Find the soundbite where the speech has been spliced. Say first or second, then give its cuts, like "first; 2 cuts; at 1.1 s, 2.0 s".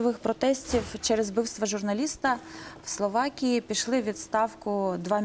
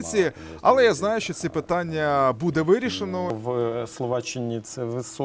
second; 1 cut; at 3.4 s